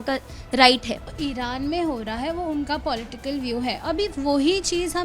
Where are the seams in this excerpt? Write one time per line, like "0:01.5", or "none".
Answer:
0:01.1